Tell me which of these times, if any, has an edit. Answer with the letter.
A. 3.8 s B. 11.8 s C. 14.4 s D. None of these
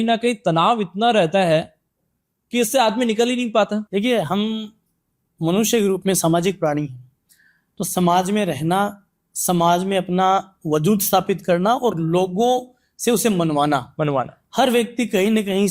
D